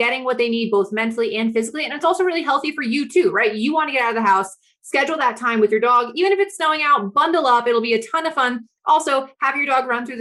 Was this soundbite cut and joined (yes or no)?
no